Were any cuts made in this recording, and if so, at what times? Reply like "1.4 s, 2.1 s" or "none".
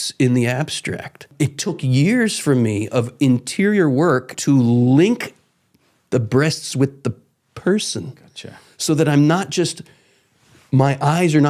1.3 s, 4.3 s